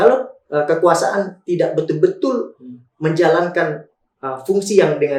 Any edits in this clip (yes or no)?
no